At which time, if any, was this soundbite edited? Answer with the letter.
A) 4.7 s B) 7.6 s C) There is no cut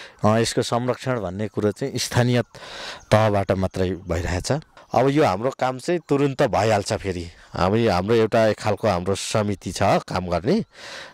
A